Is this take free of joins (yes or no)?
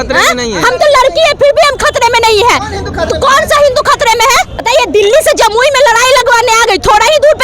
no